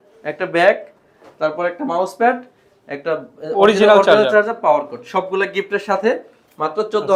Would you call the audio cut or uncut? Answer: uncut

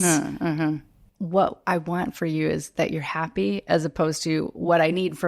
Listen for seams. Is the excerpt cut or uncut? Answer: cut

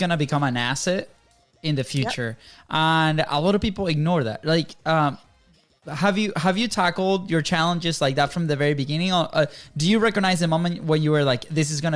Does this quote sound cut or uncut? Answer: uncut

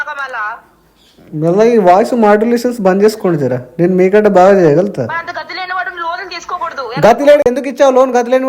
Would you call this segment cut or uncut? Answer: cut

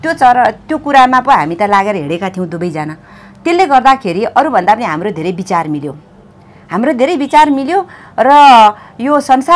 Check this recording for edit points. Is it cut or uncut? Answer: uncut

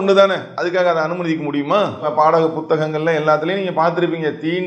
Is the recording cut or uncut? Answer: cut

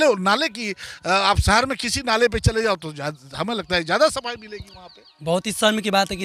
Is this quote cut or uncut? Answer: uncut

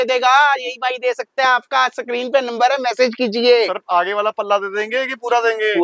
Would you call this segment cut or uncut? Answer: uncut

